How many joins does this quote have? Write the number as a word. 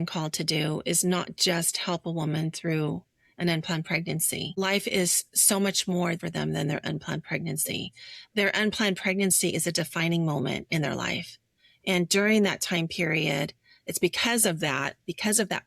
two